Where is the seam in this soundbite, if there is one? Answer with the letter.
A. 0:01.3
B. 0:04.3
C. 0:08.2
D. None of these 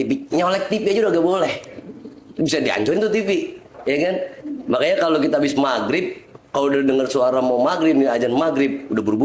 D